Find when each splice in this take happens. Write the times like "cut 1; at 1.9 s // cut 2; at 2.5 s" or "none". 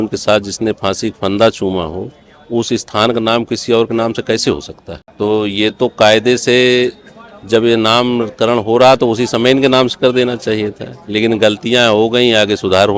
none